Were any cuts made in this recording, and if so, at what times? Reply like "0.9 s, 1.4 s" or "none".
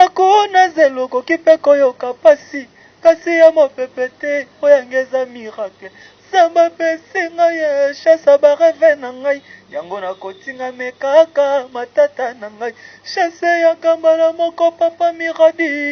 none